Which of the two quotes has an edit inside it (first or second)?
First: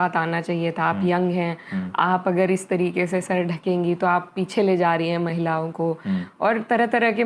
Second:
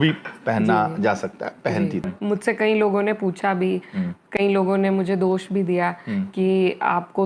second